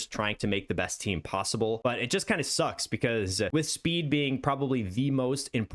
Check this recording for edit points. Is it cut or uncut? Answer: cut